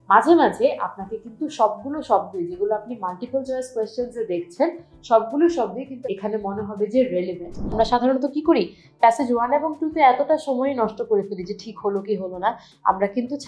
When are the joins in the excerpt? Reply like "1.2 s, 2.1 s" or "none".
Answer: 5.9 s, 7.7 s